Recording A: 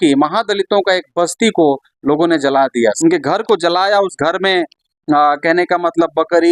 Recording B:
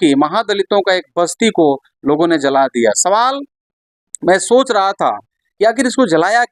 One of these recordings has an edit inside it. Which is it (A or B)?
A